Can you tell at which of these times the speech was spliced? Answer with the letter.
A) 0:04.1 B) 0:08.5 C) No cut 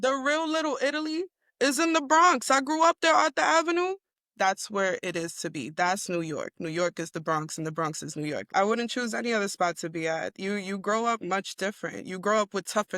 A